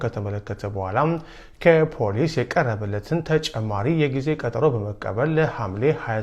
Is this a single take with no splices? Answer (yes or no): yes